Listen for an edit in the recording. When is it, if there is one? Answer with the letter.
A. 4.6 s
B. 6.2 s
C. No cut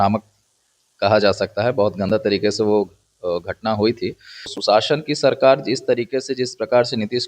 A